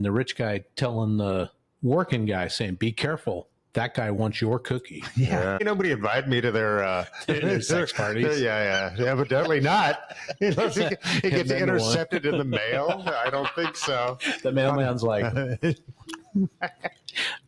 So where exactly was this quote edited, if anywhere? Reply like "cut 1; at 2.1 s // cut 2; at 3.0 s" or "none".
cut 1; at 5.6 s